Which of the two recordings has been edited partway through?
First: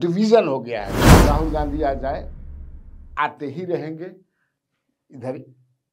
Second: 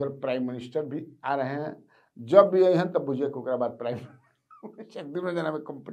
first; 1 cut; at 1.0 s

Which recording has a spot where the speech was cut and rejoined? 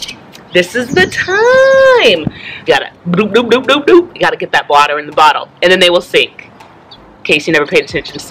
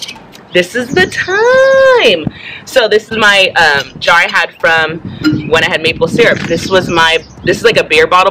first; 1 cut; at 2.5 s

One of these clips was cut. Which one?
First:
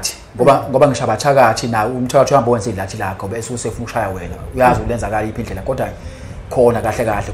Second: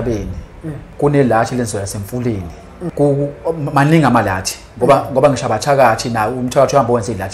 second; 2 cuts; at 0.8 s, 2.9 s

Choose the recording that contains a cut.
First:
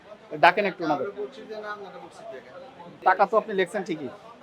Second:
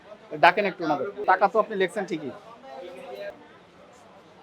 second; 2 cuts; at 1.2 s, 3.4 s

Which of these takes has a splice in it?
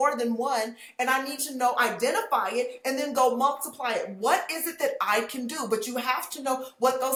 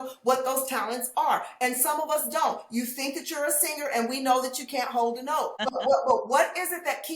second; 1 cut; at 5.6 s

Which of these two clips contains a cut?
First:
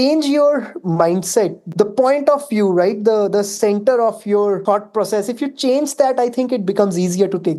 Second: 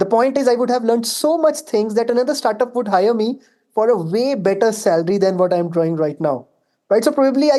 first; 2 cuts; at 1.7 s, 4.6 s

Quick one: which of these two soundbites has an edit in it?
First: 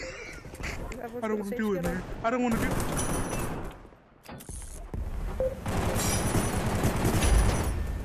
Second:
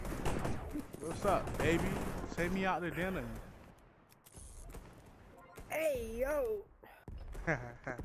first; 1 cut; at 0.9 s

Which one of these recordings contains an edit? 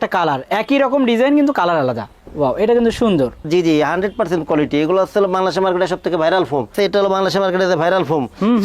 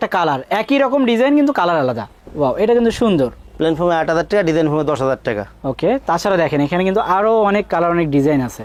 first; 2 cuts; at 3.4 s, 6.7 s

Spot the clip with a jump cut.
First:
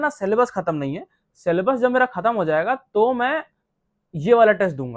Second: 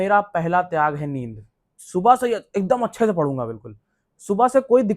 second; 1 cut; at 1.7 s

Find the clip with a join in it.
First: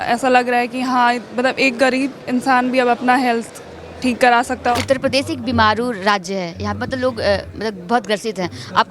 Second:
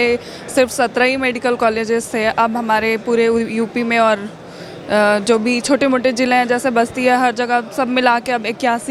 first; 1 cut; at 4.7 s

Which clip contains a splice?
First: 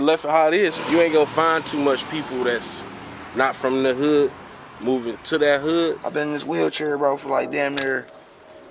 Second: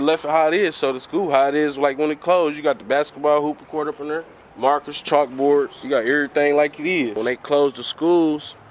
first; 2 cuts; at 0.8 s, 6.0 s

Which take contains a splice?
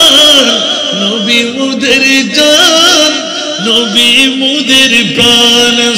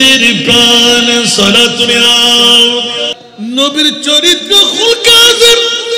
second; 1 cut; at 3.2 s

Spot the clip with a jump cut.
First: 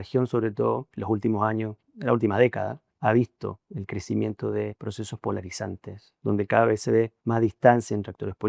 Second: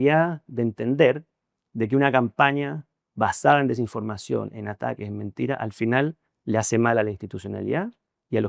first; 5 cuts; at 0.9 s, 2.8 s, 3.7 s, 4.8 s, 7.2 s

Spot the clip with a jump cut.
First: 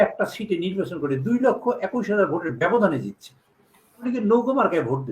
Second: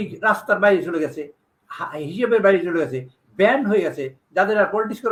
first; 1 cut; at 4.0 s

